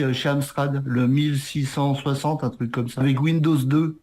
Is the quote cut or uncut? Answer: cut